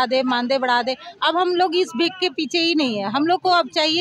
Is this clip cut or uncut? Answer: uncut